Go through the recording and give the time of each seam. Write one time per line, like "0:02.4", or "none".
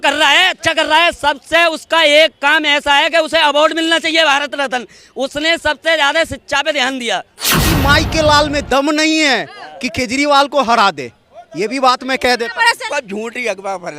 0:07.5
0:12.9